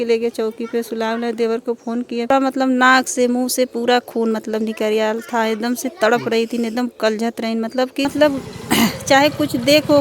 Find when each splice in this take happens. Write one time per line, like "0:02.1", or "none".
0:02.3
0:08.1